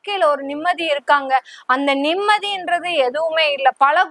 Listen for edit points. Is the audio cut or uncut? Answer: uncut